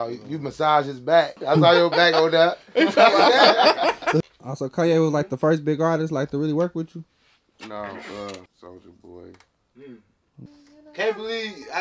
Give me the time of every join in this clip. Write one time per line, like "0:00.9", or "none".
0:01.4
0:04.2
0:08.5
0:10.5